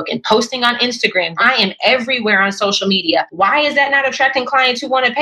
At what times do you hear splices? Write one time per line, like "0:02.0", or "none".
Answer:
0:01.4
0:03.3